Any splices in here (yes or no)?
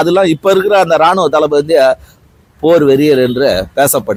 no